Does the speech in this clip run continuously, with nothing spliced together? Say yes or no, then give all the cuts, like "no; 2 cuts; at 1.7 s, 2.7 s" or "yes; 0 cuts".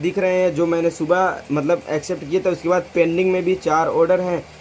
yes; 0 cuts